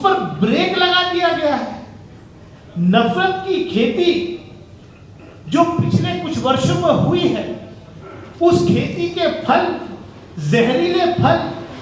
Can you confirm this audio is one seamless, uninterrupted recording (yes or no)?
yes